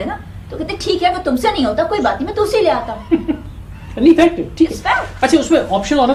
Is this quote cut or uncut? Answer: uncut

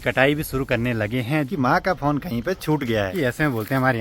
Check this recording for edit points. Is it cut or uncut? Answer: cut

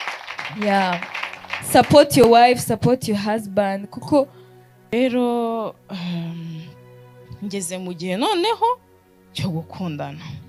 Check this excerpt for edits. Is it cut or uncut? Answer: cut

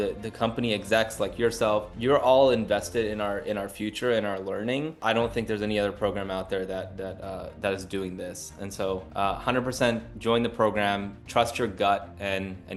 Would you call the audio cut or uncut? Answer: uncut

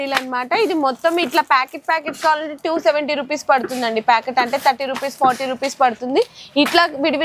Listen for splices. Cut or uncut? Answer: uncut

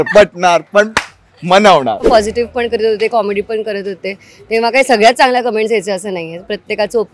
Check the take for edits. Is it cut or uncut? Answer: cut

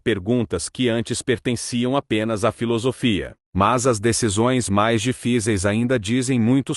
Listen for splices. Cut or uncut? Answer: cut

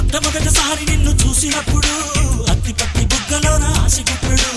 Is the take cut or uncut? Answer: uncut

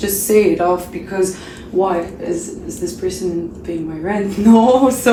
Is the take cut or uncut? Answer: uncut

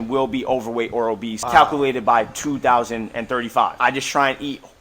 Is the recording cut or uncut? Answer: cut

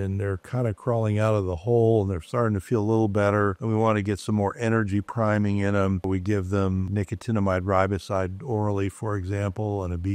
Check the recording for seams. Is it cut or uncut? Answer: cut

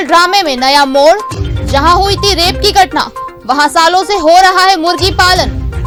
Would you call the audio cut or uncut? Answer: uncut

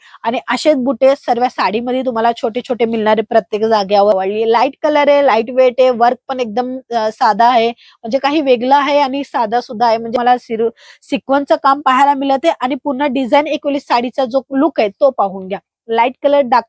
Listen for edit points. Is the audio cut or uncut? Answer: cut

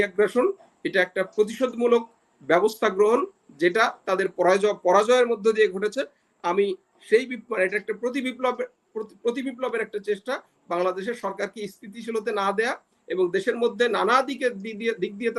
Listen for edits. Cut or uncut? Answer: uncut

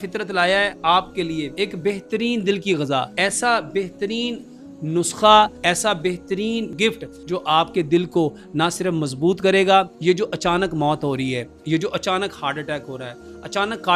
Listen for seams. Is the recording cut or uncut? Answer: cut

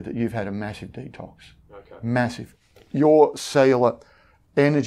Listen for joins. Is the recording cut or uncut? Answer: cut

